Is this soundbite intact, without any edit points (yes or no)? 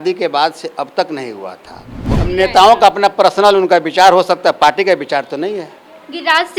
no